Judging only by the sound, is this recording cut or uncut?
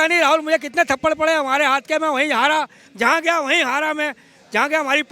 uncut